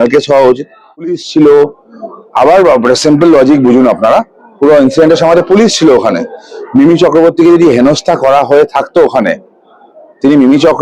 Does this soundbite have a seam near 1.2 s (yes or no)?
yes